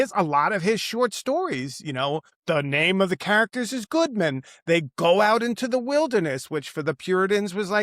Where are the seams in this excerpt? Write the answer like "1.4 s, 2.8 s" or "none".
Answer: 2.3 s